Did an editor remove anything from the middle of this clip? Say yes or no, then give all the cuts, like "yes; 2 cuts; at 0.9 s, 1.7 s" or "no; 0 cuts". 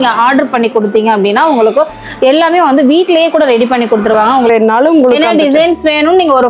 yes; 1 cut; at 4.5 s